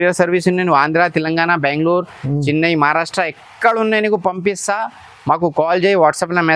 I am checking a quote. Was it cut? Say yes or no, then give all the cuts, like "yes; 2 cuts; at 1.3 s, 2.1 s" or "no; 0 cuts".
no; 0 cuts